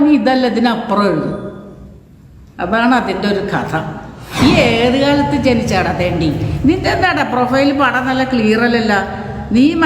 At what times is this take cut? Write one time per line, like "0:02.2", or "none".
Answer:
0:04.4